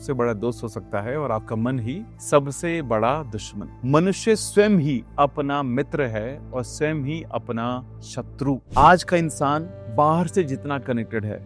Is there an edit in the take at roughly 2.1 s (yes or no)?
no